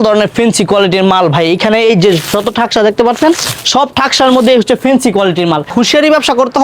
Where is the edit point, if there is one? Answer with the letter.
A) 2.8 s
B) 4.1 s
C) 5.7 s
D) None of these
C